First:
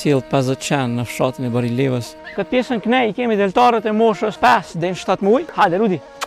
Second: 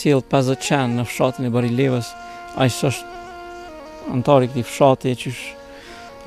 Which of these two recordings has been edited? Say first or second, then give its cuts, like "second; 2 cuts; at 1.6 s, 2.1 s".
first; 3 cuts; at 2.2 s, 4.3 s, 5.5 s